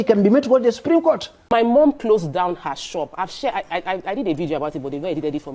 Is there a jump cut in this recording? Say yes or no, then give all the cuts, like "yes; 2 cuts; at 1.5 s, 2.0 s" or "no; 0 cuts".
yes; 1 cut; at 1.4 s